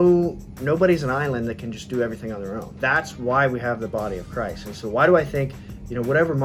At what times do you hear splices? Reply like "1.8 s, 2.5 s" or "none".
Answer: 2.7 s